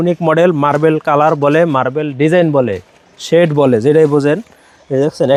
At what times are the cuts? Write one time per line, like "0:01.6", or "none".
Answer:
none